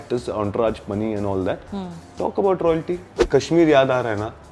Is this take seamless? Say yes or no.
no